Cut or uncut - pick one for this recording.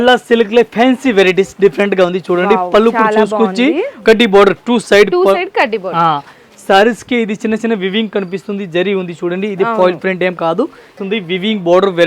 cut